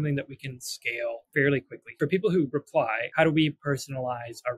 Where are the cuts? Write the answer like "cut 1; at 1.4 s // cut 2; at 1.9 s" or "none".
cut 1; at 1.2 s // cut 2; at 1.8 s // cut 3; at 3.0 s